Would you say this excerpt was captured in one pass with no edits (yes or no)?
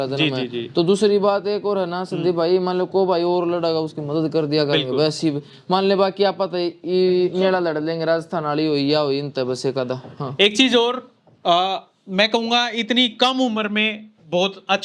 yes